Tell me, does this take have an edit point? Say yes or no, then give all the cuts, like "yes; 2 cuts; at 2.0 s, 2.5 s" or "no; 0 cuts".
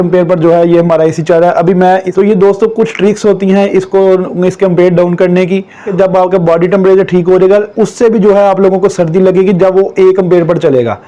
yes; 2 cuts; at 2.1 s, 5.9 s